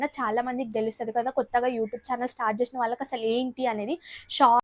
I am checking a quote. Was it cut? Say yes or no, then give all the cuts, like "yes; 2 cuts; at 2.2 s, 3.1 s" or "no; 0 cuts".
no; 0 cuts